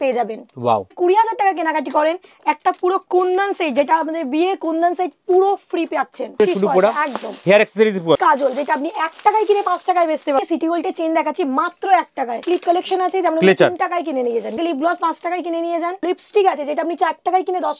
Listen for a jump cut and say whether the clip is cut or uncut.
cut